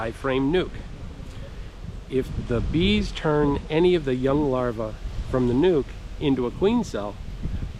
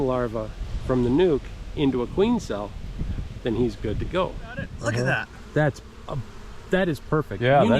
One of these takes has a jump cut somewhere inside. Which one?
second; 1 cut; at 4.7 s

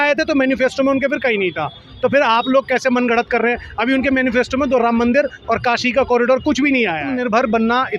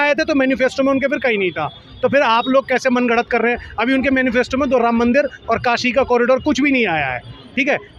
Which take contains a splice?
first; 1 cut; at 7.1 s

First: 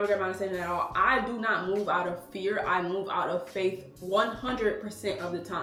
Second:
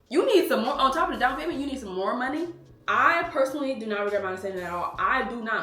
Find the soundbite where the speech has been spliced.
second; 1 cut; at 2.7 s

